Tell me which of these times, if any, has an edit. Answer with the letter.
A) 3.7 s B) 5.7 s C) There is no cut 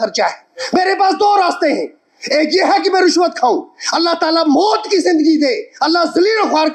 C